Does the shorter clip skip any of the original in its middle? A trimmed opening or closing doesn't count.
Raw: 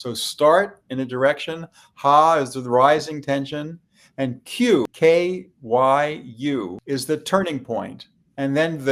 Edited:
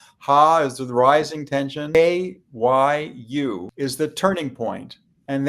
yes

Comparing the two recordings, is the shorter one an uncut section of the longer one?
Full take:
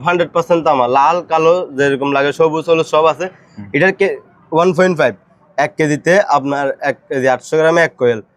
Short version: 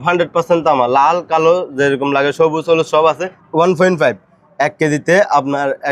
no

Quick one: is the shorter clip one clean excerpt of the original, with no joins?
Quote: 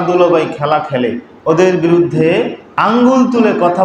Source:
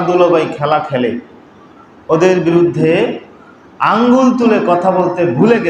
no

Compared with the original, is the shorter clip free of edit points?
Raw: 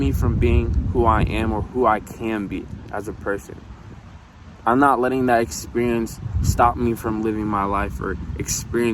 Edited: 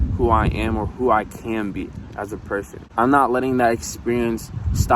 no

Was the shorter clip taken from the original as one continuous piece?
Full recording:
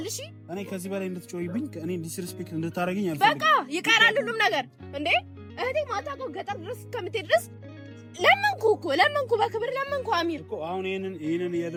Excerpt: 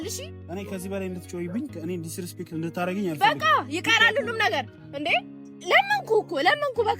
no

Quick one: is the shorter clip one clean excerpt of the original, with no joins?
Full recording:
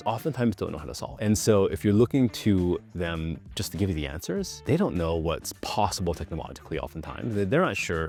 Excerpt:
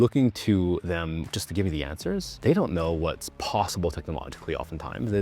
no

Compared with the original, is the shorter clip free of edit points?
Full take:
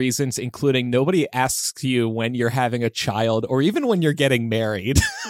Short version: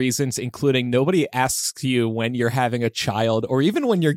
yes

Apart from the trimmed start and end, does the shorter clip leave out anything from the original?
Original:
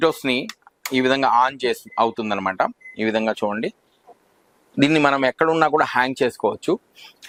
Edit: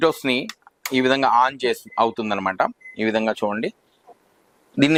no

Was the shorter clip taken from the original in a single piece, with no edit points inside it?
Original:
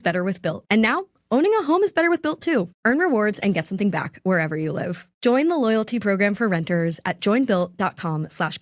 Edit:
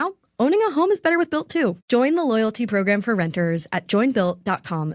no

